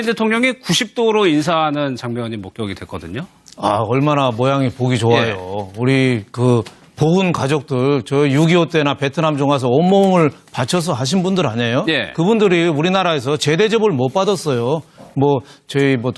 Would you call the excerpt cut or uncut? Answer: uncut